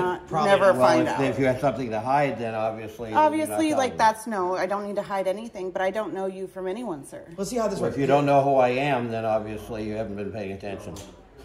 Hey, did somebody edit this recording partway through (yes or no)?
no